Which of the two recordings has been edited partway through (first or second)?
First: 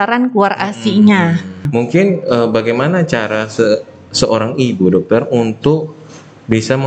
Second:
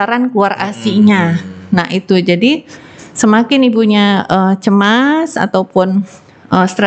first